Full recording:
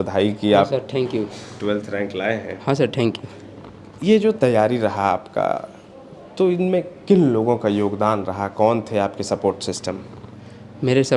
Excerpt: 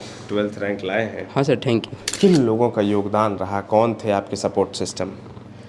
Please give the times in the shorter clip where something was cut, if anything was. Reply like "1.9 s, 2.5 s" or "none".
2.1 s